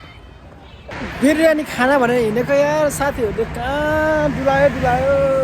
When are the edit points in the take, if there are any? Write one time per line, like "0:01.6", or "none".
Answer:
0:00.9